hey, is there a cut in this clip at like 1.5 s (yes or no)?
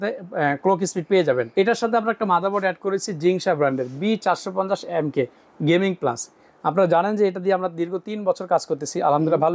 yes